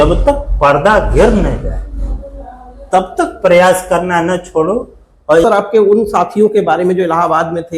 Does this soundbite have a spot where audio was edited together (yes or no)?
yes